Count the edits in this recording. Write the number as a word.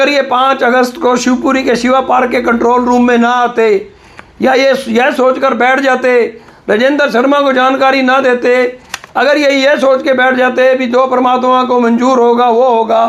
zero